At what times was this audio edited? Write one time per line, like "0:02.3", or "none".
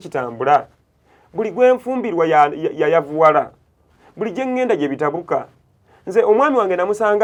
none